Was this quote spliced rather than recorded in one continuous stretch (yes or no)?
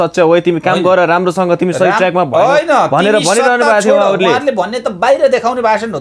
no